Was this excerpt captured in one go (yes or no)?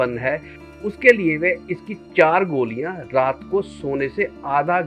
yes